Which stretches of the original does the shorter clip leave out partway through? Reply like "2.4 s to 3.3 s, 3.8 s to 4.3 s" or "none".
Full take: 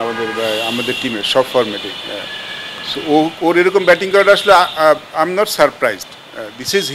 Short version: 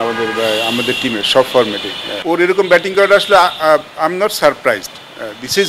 2.2 s to 3.4 s